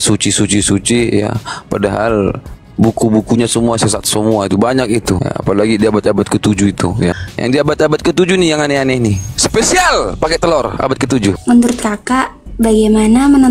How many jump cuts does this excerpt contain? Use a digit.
4